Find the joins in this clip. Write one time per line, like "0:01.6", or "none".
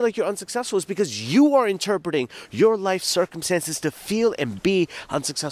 none